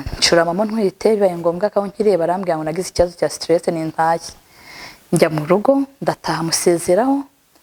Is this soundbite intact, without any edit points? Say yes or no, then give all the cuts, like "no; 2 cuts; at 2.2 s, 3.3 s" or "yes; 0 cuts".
yes; 0 cuts